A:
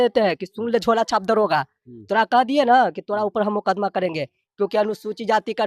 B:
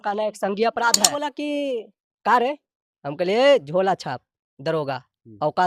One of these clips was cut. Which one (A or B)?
B